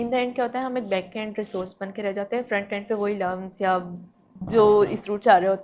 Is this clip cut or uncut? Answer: uncut